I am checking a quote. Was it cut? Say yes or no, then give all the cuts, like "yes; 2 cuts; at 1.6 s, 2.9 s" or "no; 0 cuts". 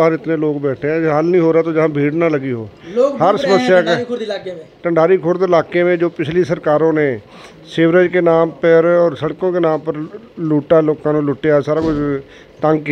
no; 0 cuts